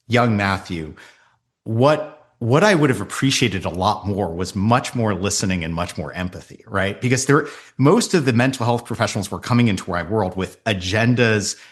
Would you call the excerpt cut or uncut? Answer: uncut